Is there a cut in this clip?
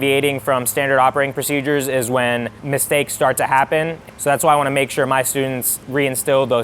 yes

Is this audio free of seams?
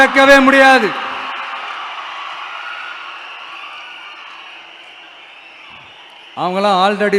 yes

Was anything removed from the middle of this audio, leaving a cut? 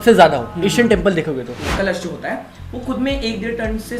yes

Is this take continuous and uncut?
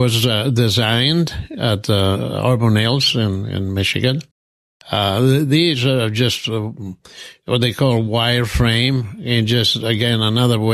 yes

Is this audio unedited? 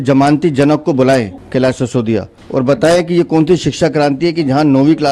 no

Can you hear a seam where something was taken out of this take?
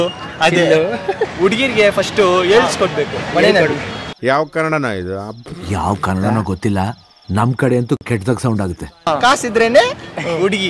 yes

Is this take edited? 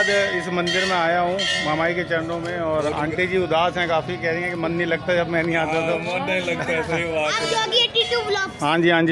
no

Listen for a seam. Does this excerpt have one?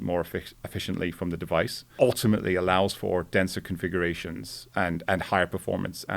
yes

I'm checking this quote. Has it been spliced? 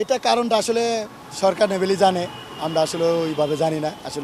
no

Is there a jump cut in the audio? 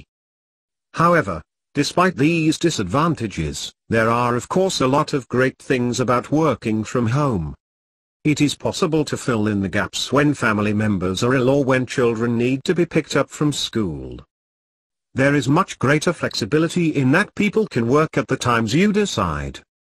no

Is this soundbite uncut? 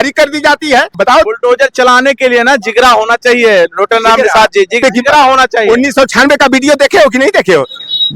no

